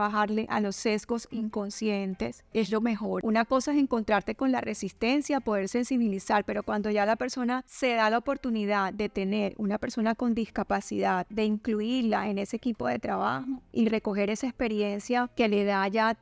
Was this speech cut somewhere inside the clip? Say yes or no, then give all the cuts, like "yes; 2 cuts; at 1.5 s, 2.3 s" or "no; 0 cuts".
yes; 1 cut; at 3.2 s